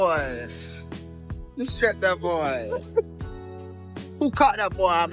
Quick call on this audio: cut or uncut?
uncut